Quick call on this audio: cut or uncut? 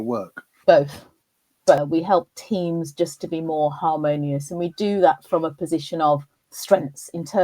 cut